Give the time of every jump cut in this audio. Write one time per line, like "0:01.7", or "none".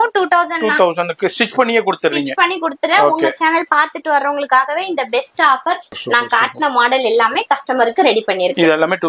0:05.9